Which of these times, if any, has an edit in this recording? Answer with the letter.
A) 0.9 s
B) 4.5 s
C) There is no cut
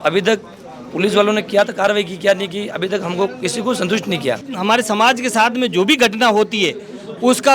B